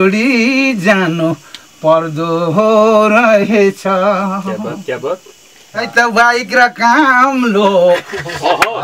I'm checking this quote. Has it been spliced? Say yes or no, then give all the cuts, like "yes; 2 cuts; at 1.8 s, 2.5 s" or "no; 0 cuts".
yes; 1 cut; at 5.9 s